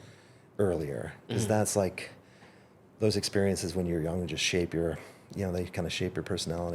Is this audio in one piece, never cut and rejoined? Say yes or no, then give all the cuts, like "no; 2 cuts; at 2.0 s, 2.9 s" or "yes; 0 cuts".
yes; 0 cuts